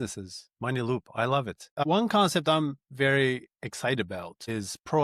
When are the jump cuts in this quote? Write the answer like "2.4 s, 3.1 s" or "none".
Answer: 1.7 s

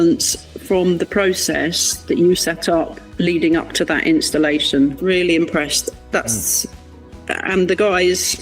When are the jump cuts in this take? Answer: 5.0 s

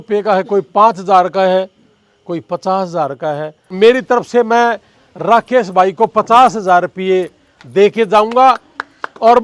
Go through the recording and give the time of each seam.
3.7 s

